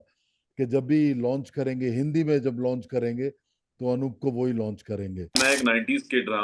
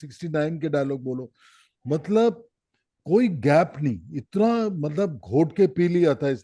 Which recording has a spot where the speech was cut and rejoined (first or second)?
first